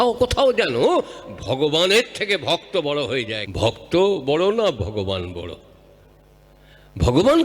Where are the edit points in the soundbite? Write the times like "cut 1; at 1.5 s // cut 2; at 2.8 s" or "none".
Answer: cut 1; at 3.4 s